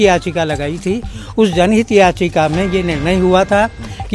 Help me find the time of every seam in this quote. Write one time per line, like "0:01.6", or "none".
none